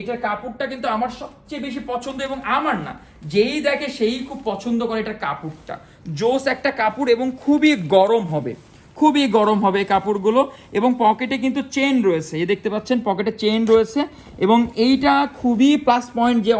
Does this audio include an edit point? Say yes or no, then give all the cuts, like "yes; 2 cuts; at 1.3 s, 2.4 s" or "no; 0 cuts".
no; 0 cuts